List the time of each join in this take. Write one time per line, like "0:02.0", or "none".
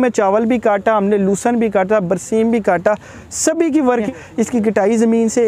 0:04.1